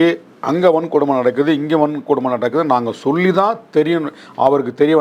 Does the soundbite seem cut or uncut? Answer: uncut